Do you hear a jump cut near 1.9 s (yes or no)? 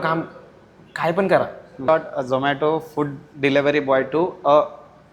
yes